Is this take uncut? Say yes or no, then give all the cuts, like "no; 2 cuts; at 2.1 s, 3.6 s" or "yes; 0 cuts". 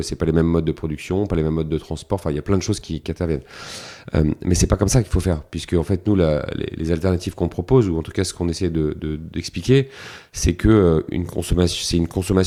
yes; 0 cuts